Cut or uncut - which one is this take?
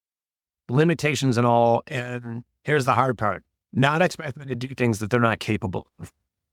uncut